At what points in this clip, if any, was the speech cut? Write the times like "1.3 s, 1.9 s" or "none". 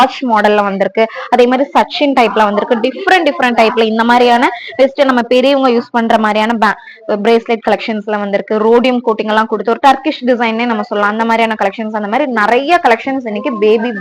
none